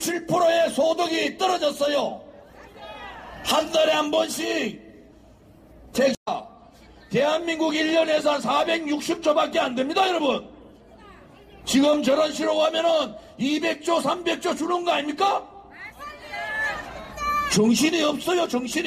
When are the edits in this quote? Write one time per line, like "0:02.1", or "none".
0:06.3